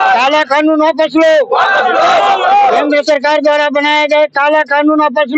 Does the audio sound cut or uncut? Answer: uncut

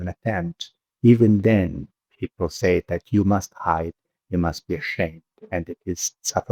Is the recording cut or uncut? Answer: uncut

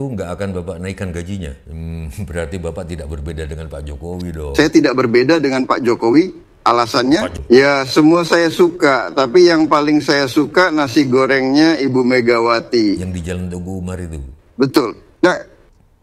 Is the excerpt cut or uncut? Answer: cut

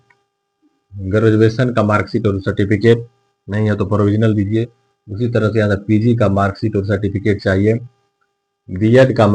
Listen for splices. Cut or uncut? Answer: uncut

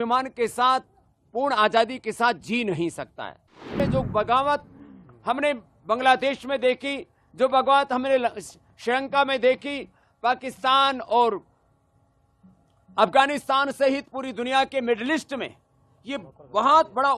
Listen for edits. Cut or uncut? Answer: cut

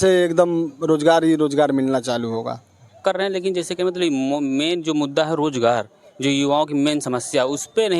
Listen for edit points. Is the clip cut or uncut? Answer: cut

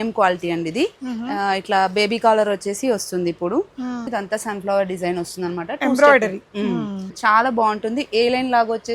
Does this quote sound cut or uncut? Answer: cut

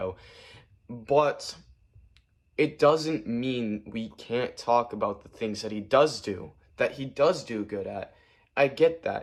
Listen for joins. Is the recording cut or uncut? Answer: uncut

